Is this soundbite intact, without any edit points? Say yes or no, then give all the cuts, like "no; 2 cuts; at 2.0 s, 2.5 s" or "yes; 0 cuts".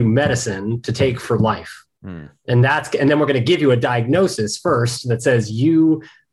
yes; 0 cuts